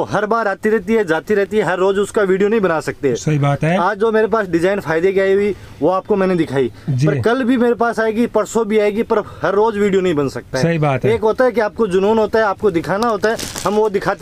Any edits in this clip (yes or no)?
no